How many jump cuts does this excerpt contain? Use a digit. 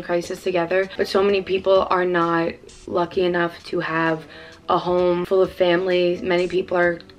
2